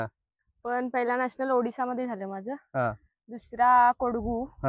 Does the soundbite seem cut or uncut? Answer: uncut